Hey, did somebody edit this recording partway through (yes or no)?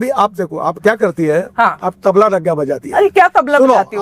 no